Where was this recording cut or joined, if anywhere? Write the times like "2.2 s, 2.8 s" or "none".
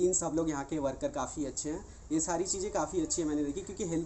none